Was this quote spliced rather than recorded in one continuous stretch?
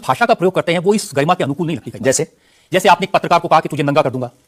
no; 0 cuts

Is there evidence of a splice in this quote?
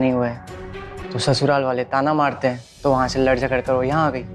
no; 0 cuts

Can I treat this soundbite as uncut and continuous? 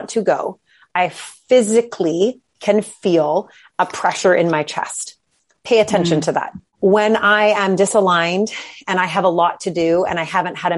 no; 1 cut; at 6.6 s

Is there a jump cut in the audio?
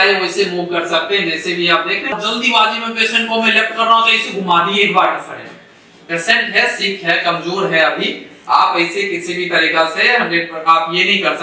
yes; 1 cut; at 2.2 s

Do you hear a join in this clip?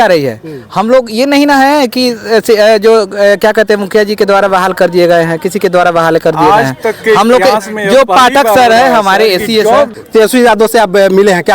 yes; 1 cut; at 9.9 s

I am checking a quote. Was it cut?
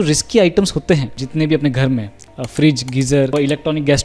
yes; 2 cuts; at 1.2 s, 3.3 s

